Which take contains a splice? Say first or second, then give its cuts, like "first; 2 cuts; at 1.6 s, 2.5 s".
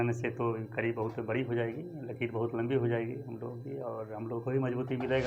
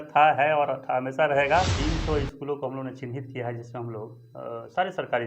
second; 1 cut; at 1.7 s